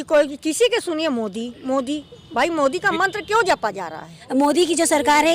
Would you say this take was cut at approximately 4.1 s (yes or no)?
yes